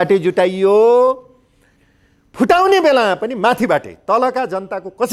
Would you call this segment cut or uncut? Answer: uncut